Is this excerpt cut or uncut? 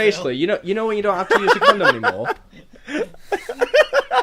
cut